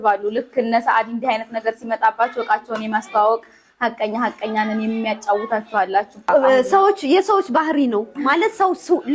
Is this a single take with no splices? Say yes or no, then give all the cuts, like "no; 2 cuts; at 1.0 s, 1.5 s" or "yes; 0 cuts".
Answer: yes; 0 cuts